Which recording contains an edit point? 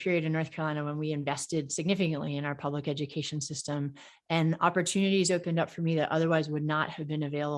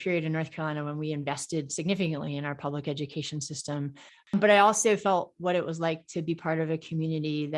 second; 1 cut; at 4.3 s

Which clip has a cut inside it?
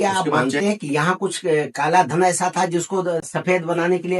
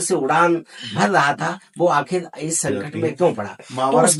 first; 1 cut; at 3.3 s

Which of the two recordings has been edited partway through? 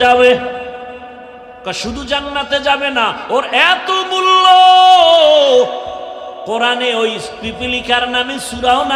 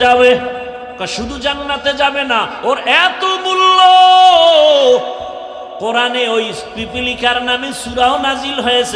second; 1 cut; at 0.9 s

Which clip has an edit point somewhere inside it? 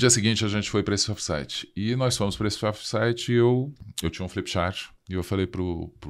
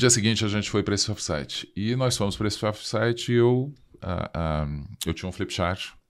first; 1 cut; at 3.8 s

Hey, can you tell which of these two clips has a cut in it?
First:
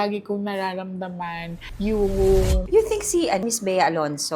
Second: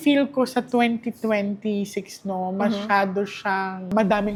first; 2 cuts; at 2.6 s, 3.4 s

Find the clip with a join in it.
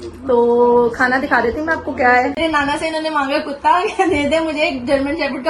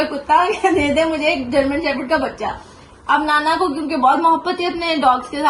first; 1 cut; at 2.4 s

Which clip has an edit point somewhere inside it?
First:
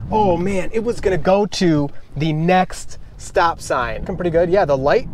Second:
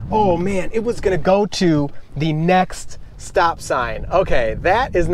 first; 1 cut; at 4.1 s

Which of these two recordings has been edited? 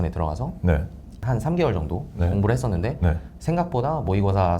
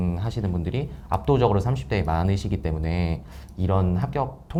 first; 1 cut; at 1.1 s

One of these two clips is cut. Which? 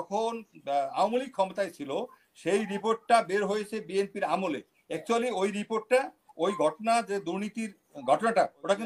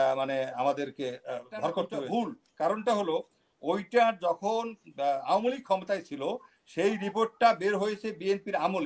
second; 1 cut; at 1.9 s

